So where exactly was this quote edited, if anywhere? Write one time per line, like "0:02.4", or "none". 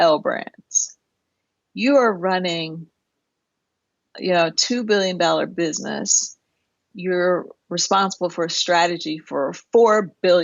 0:06.8

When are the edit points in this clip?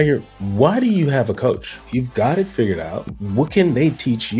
0:01.8

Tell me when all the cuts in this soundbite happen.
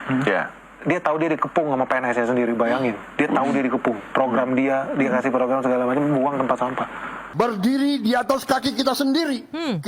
0:07.3

